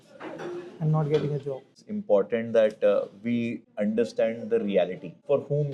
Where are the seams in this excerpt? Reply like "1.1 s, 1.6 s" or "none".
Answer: 1.7 s